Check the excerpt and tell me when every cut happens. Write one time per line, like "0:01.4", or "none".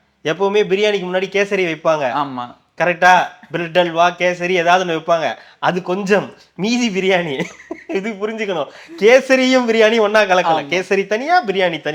none